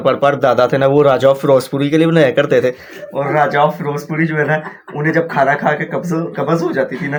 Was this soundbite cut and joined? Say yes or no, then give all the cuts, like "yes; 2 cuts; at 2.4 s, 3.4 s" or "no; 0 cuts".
no; 0 cuts